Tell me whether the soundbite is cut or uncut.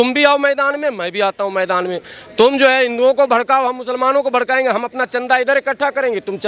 uncut